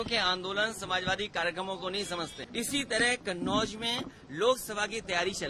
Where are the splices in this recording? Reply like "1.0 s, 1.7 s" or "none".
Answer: 2.3 s